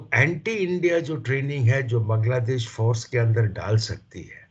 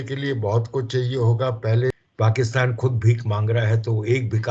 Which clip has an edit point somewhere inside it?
second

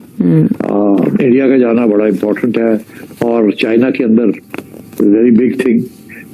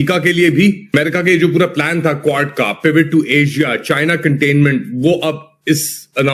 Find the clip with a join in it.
second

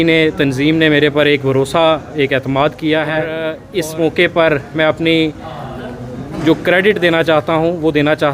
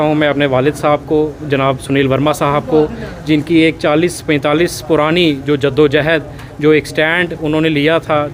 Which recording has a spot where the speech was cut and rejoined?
first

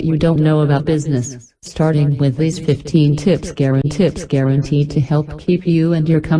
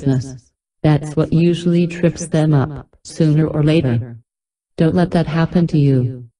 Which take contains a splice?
first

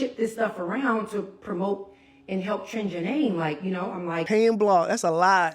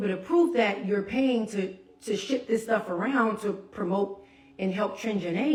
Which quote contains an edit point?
first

